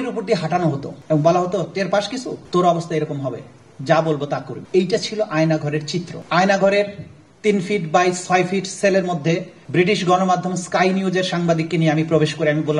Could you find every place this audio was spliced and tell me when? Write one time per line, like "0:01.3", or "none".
0:00.9
0:02.4
0:04.6
0:06.2
0:09.6